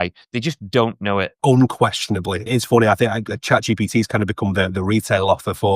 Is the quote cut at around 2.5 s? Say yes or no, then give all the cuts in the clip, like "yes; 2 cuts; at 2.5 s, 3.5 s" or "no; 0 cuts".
yes; 2 cuts; at 1.4 s, 2.5 s